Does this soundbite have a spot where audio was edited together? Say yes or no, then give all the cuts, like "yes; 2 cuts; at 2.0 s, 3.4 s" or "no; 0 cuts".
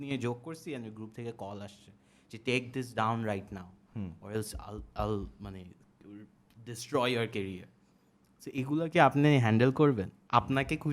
no; 0 cuts